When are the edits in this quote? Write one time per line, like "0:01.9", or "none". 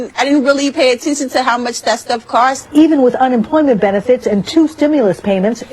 0:03.0